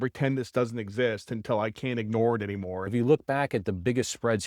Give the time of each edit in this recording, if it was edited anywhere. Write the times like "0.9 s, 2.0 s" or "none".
2.9 s